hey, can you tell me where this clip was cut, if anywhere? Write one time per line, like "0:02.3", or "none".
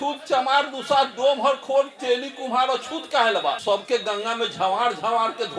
0:03.6